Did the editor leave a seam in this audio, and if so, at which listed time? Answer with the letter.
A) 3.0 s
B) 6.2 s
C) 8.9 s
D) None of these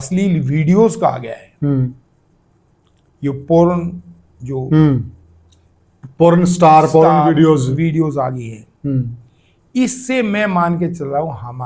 D